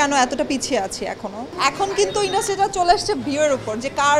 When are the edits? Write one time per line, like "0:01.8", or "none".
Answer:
0:01.4